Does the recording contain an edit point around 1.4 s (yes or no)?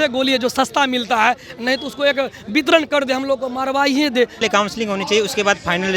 no